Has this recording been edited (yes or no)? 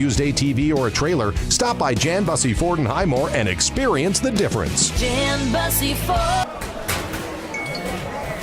yes